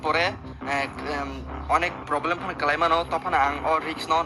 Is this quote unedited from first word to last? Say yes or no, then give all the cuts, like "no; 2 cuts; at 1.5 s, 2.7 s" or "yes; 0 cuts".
yes; 0 cuts